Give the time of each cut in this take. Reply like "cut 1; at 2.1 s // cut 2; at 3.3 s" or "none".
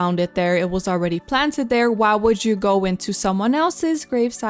none